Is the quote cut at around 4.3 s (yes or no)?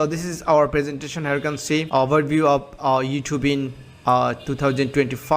no